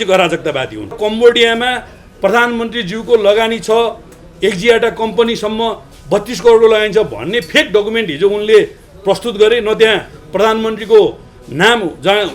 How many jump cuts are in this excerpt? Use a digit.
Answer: 1